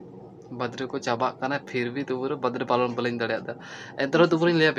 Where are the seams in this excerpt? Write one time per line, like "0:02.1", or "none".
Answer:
none

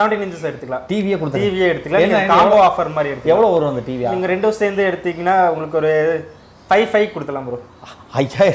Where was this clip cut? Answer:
none

